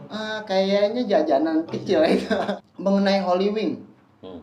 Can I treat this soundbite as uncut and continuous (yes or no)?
no